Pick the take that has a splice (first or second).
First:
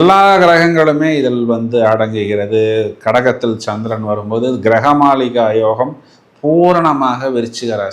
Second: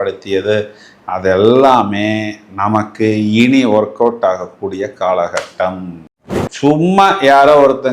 second